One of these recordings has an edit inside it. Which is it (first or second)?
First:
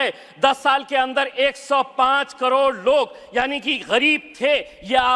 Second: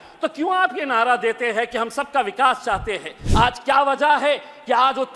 second